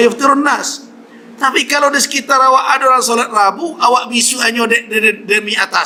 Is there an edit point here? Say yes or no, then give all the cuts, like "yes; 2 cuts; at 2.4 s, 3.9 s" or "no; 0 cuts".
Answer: no; 0 cuts